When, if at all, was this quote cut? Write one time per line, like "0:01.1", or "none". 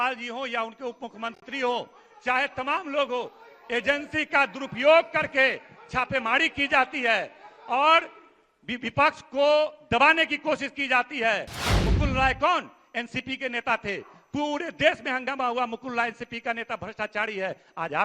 0:11.6